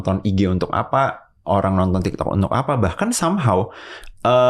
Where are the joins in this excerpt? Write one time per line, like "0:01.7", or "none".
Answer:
none